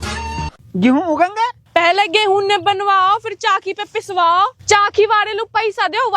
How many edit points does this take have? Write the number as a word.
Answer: one